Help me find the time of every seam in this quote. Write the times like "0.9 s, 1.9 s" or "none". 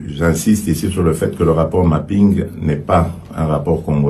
none